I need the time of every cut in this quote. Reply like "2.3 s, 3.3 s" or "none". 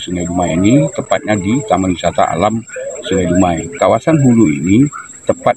3.7 s